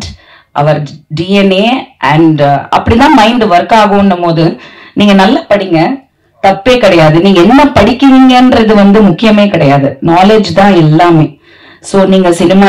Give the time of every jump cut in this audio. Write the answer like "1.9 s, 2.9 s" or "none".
none